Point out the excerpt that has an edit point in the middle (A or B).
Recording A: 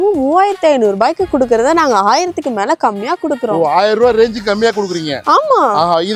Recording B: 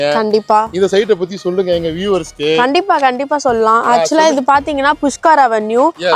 B